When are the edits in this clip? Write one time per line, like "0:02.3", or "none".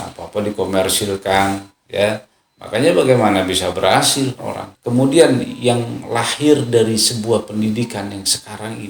0:04.7